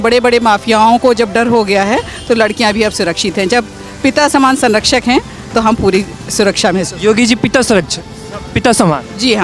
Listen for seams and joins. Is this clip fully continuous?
yes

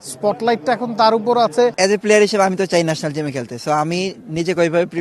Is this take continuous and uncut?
no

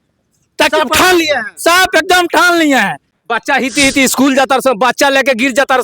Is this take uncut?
no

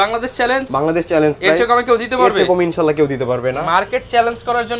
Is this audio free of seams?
yes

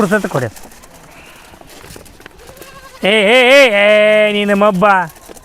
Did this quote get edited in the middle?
yes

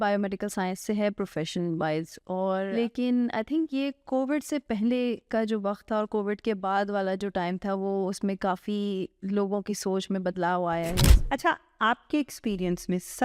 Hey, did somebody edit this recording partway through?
yes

